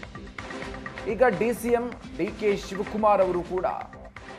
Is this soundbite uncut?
no; 1 cut; at 1.0 s

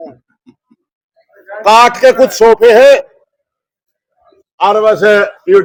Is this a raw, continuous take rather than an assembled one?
yes; 0 cuts

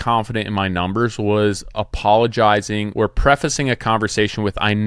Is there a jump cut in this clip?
yes; 1 cut; at 2.9 s

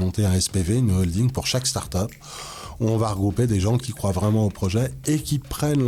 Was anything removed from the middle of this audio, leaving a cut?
no; 0 cuts

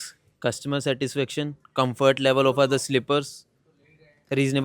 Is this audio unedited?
yes; 0 cuts

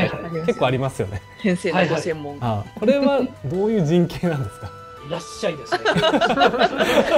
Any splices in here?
no; 0 cuts

